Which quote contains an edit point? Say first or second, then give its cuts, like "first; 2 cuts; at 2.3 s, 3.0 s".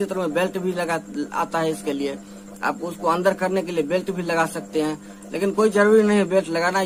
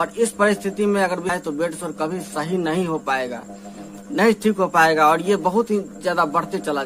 second; 1 cut; at 1.3 s